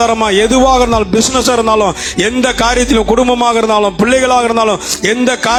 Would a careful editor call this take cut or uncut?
uncut